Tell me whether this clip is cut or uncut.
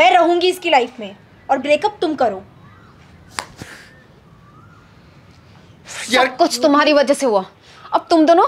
uncut